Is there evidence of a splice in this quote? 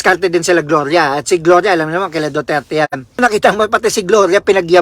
yes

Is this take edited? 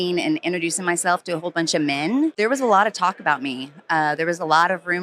yes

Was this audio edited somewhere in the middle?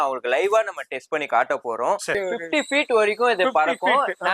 yes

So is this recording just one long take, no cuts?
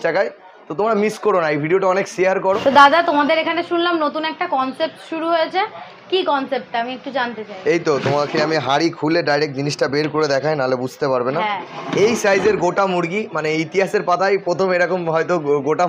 no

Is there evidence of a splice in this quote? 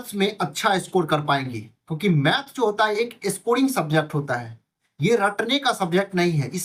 no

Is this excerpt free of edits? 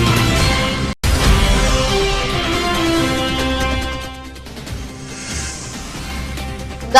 no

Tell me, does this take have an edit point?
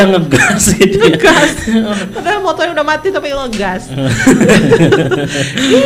no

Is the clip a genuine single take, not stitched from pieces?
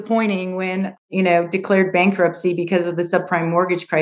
no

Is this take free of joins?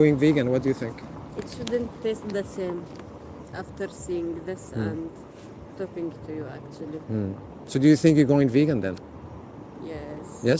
yes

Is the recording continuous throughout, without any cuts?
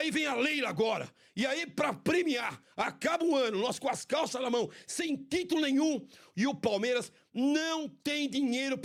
yes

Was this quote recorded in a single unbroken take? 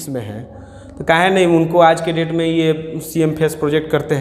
yes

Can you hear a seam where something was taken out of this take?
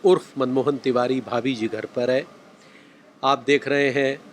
no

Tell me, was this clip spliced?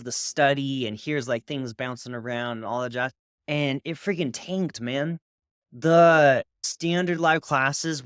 yes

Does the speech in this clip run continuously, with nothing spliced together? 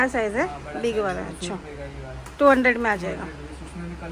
yes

